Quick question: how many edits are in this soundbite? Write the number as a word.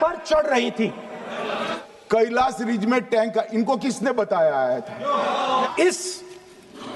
two